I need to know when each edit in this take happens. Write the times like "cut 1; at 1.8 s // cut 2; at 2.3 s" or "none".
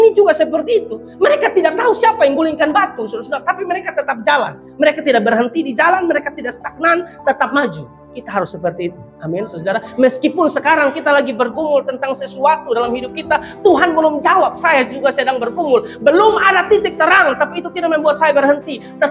none